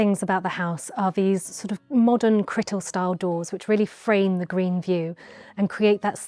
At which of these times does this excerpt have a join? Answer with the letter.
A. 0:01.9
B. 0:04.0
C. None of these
C